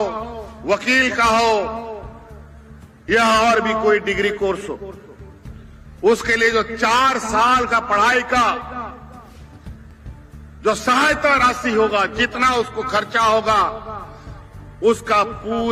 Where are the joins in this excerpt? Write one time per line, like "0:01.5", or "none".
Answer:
none